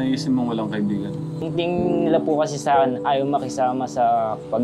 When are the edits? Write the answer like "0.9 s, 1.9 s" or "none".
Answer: 1.4 s